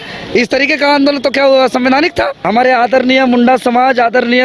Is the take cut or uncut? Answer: cut